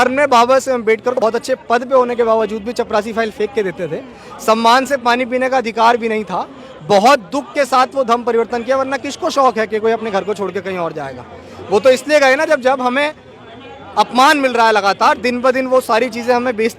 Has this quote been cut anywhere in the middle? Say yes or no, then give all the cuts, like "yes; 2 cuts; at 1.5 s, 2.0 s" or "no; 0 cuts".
yes; 1 cut; at 1.2 s